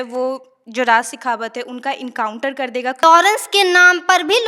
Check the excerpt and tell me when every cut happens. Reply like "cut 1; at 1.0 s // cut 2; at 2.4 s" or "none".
cut 1; at 3.0 s